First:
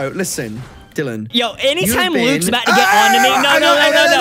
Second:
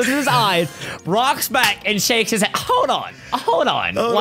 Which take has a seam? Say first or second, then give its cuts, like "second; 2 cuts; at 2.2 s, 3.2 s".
first; 1 cut; at 1.2 s